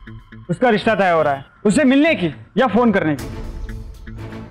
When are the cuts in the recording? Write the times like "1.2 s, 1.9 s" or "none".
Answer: none